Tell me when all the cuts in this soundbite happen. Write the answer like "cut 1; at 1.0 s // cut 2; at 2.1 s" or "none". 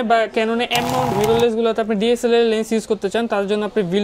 none